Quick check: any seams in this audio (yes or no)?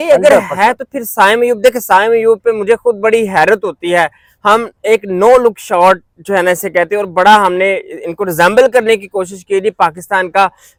no